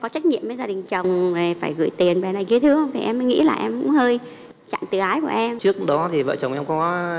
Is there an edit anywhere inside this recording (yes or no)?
yes